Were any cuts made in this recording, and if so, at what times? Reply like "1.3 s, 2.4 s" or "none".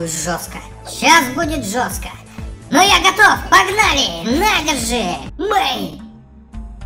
5.3 s